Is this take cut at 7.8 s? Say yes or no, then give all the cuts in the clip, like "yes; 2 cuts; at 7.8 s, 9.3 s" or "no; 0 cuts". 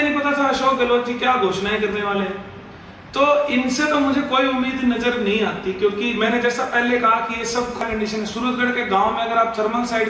yes; 1 cut; at 7.8 s